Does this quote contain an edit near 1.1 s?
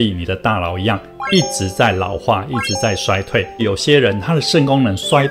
no; 1 cut; at 4.1 s

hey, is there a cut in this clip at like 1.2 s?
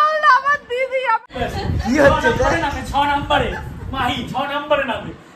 yes; 1 cut; at 1.2 s

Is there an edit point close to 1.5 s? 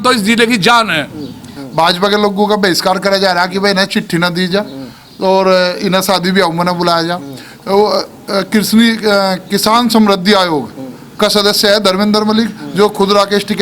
yes; 1 cut; at 1.5 s

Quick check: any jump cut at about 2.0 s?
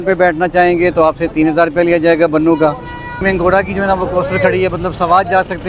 no; 1 cut; at 3.2 s

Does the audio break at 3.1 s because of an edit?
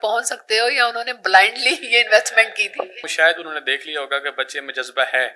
yes; 1 cut; at 3.1 s

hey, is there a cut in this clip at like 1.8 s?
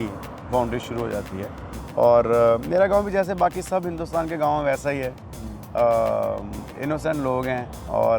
yes; 1 cut; at 1.8 s

